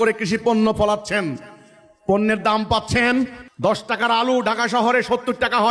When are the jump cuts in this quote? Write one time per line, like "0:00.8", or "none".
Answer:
0:03.4